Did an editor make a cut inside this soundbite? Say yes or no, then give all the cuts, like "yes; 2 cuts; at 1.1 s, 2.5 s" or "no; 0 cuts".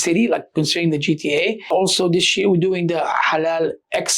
yes; 1 cut; at 1.7 s